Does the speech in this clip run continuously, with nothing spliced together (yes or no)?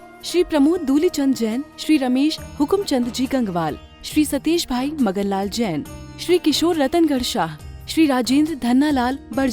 yes